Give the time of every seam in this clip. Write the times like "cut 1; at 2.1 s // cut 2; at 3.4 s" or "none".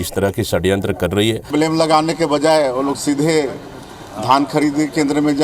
cut 1; at 1.5 s

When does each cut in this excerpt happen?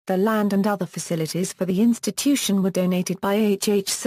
cut 1; at 1.7 s

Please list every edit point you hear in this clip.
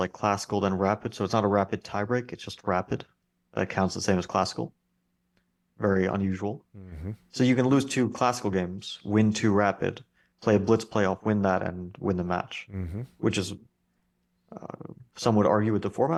none

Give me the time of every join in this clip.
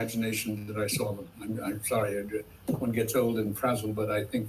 none

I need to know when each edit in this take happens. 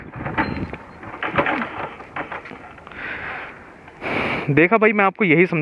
none

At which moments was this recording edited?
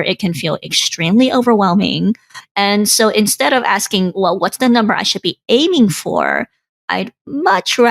cut 1; at 2.3 s

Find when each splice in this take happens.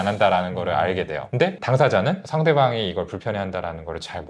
none

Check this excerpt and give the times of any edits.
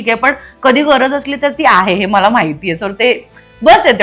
none

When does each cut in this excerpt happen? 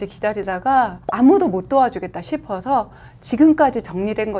cut 1; at 1.0 s

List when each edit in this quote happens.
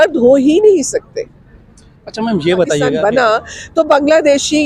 cut 1; at 2.9 s

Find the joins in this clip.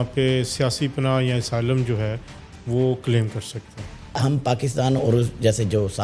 cut 1; at 4.1 s

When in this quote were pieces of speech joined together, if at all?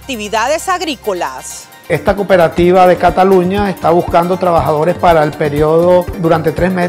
cut 1; at 1.8 s

